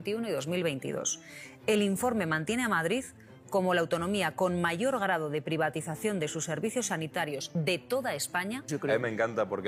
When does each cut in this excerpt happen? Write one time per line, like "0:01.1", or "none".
0:07.5
0:08.7